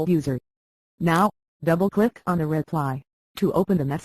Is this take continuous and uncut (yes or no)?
yes